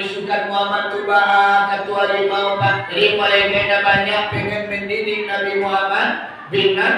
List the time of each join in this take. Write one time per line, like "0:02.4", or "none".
0:02.9

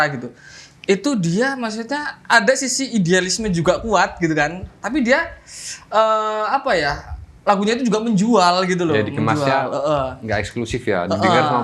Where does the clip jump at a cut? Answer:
none

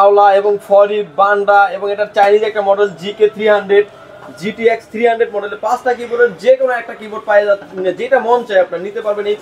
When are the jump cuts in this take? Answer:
none

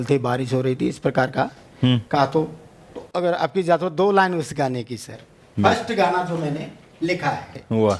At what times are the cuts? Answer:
none

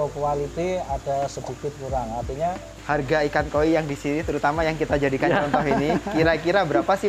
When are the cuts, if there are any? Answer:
0:02.7

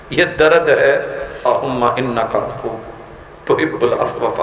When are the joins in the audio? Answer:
0:01.5

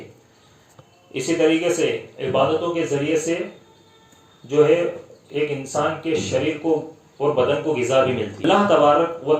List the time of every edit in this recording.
0:08.4

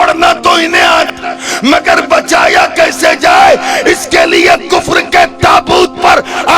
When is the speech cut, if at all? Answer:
0:01.1

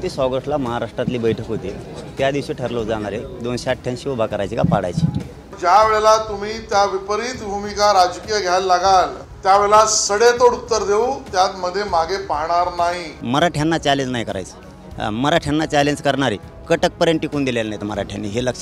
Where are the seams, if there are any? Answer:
0:05.5
0:09.2
0:13.2
0:16.5

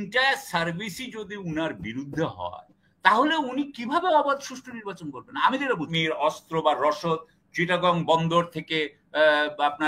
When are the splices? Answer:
0:05.9

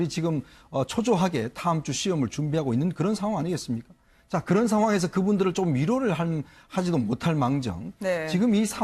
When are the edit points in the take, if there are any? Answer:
0:01.6

